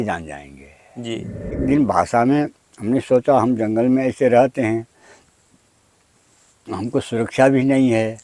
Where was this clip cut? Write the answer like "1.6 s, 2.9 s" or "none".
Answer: 1.6 s